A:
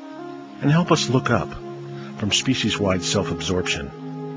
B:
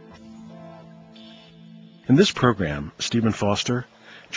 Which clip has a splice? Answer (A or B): A